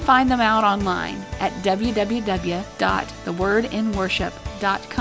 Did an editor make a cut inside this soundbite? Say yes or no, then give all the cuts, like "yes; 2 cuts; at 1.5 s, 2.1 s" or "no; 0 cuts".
yes; 1 cut; at 2.7 s